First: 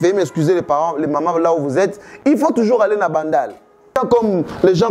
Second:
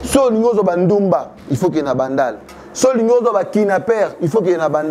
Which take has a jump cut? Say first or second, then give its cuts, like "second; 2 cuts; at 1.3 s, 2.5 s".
first; 1 cut; at 3.9 s